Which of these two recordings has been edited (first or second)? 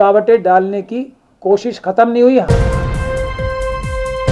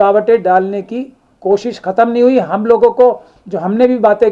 first